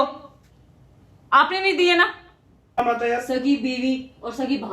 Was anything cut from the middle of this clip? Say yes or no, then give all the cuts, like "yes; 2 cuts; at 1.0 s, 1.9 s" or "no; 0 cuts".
yes; 1 cut; at 2.8 s